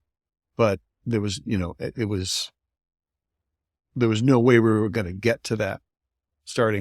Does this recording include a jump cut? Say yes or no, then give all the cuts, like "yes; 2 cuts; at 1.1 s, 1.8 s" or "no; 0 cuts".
no; 0 cuts